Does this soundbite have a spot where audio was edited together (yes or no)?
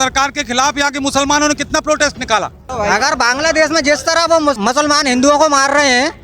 yes